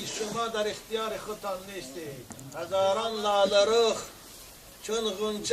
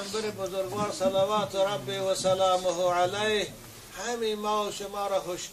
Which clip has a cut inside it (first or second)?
first